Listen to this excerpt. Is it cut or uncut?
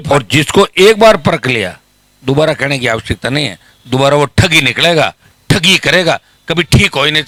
uncut